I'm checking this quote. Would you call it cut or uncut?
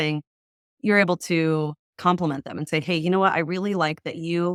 uncut